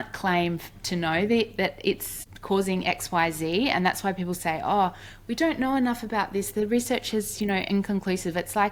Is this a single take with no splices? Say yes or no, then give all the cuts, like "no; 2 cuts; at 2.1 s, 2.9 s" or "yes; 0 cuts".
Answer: yes; 0 cuts